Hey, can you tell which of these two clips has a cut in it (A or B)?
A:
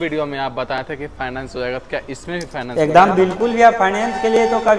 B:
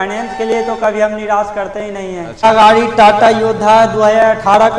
B